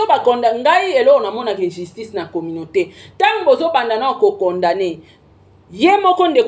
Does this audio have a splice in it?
no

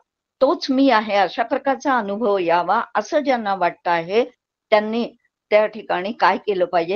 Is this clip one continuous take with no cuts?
yes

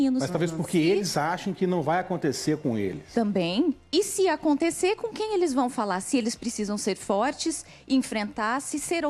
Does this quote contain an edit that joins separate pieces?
yes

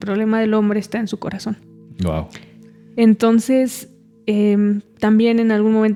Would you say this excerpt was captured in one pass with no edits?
yes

